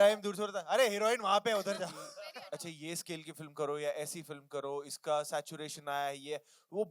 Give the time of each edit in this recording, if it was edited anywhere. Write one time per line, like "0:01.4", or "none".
0:02.3